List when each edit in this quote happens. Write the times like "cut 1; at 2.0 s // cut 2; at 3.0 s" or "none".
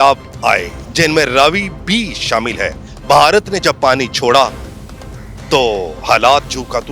none